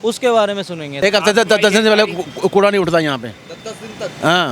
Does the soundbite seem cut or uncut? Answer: cut